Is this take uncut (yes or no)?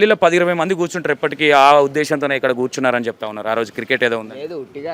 yes